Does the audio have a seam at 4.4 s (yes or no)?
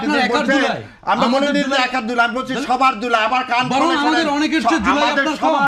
no